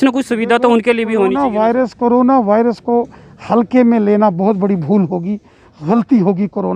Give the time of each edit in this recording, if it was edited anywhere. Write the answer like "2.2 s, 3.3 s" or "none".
none